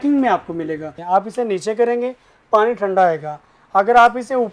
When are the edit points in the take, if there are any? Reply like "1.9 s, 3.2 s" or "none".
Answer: 0.9 s